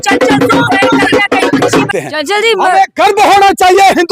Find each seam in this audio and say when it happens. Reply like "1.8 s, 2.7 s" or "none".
1.9 s